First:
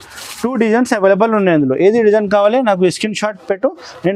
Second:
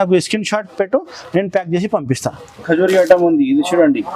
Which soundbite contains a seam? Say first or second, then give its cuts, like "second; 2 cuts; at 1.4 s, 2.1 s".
second; 1 cut; at 2.6 s